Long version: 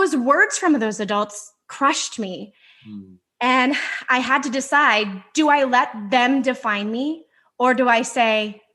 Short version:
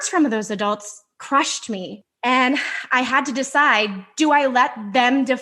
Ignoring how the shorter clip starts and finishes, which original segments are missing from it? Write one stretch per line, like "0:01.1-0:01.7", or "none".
0:02.5-0:03.2